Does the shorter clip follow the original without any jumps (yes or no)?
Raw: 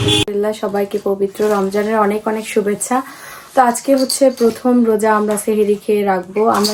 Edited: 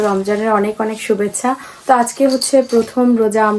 no